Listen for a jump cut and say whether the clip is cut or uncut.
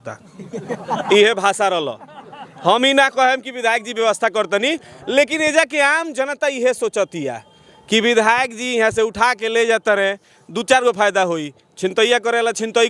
uncut